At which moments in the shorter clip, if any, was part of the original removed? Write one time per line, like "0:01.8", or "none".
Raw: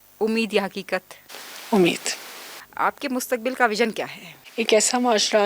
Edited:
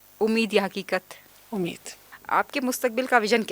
0:01.6

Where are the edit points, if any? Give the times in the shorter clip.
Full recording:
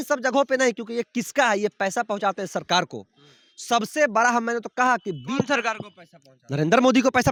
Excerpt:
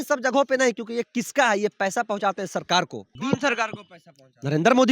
0:03.1

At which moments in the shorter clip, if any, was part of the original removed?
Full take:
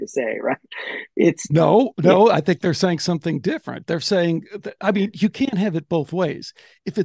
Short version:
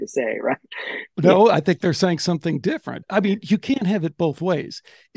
0:01.1
0:02.9

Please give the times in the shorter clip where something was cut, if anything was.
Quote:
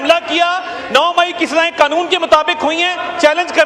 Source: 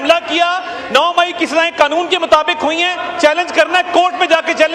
none

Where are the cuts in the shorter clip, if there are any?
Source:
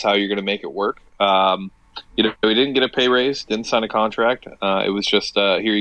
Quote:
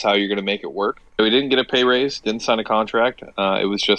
0:01.1

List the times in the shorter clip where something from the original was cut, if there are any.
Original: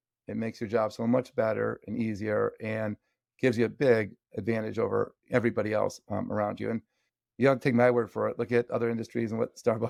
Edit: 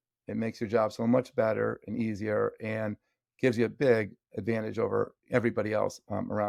none

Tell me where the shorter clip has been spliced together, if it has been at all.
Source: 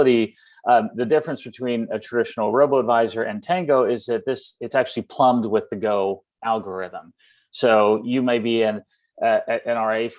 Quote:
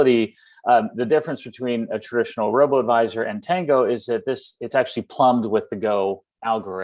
none

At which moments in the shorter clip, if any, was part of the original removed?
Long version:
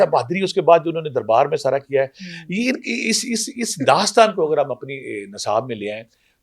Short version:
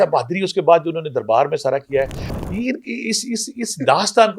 none

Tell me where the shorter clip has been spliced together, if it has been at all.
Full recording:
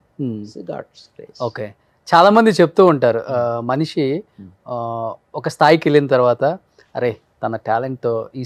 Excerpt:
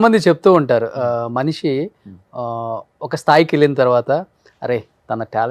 none

